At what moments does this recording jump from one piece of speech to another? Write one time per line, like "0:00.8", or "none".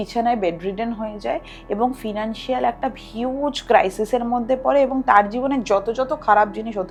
none